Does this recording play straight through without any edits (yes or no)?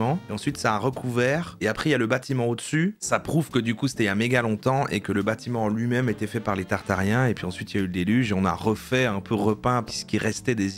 yes